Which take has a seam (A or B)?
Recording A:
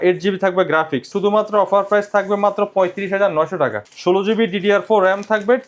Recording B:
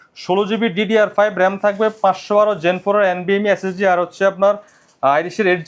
A